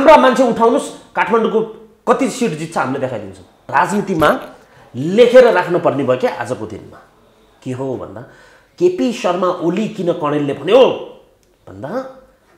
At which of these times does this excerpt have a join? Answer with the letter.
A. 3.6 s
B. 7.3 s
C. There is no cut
A